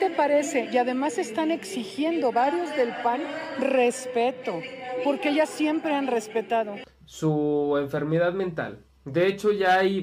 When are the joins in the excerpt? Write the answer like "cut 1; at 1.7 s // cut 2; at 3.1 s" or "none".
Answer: cut 1; at 6.8 s